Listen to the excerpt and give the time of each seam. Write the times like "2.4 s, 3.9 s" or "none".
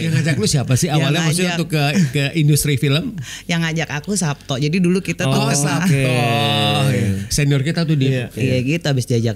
8.3 s